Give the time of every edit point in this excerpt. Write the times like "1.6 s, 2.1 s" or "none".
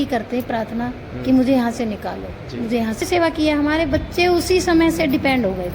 3.0 s